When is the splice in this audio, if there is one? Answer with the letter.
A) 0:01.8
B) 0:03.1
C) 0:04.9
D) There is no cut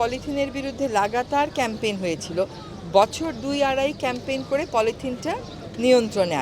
D